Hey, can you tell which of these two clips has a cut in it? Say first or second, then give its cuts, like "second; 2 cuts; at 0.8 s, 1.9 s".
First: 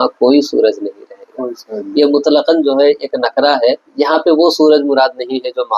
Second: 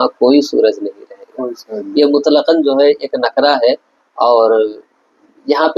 first; 1 cut; at 3.9 s